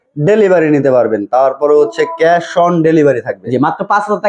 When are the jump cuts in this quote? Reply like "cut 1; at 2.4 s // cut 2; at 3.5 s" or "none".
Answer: none